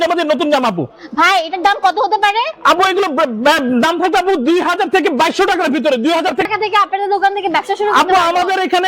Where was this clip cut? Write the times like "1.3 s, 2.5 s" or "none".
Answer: 6.5 s